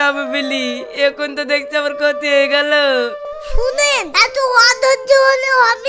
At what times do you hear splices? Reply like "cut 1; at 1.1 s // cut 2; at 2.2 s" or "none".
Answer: cut 1; at 3.2 s